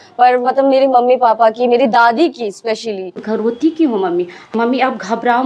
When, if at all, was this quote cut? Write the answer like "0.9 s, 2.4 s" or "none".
3.1 s, 4.5 s